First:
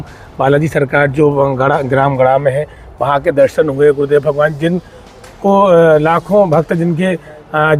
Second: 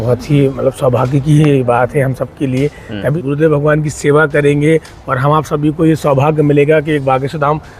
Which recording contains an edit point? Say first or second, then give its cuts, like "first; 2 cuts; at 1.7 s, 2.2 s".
second; 1 cut; at 3.1 s